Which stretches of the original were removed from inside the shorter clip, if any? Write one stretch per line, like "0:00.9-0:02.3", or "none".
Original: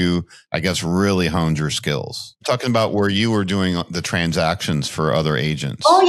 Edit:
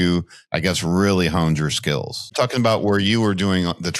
0:02.2-0:02.3